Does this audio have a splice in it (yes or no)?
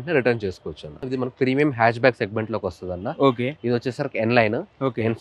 yes